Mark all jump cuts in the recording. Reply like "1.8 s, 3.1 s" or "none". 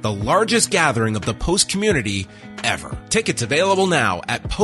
2.9 s